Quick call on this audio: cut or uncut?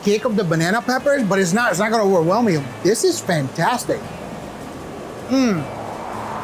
uncut